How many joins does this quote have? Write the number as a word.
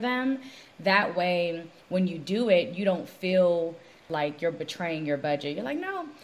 one